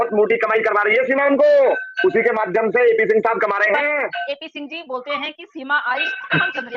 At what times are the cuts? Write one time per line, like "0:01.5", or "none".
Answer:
0:04.2